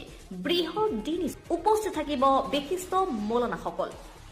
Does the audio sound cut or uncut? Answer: cut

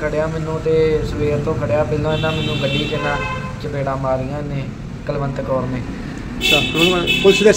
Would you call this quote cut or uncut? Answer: uncut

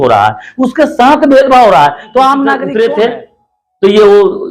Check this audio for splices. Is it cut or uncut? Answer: cut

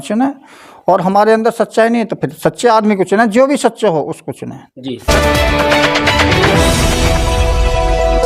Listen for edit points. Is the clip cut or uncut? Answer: cut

